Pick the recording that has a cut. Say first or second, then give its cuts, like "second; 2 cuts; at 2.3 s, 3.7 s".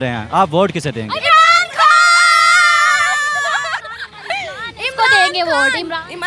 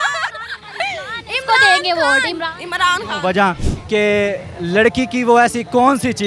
second; 1 cut; at 3.7 s